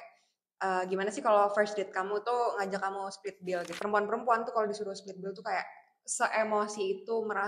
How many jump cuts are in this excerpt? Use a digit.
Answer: 1